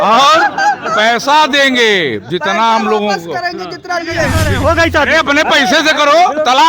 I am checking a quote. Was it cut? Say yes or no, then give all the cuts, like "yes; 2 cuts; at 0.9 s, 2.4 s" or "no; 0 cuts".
yes; 1 cut; at 4.4 s